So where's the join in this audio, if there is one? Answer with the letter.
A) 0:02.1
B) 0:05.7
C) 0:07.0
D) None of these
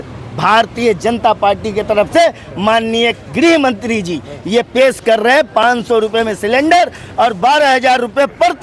D